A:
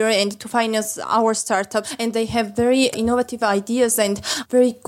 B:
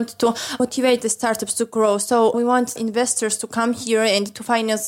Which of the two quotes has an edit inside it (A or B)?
A